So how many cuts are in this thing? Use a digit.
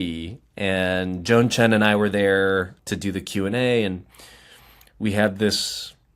1